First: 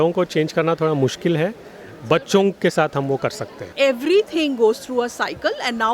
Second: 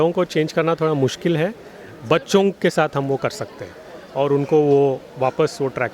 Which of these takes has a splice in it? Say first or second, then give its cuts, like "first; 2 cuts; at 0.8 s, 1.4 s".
first; 1 cut; at 3.7 s